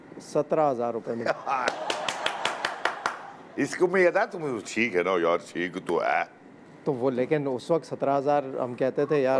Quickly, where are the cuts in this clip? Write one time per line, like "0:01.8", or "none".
none